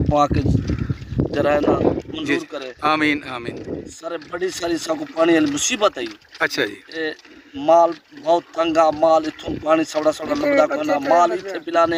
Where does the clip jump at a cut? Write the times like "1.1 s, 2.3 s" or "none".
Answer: none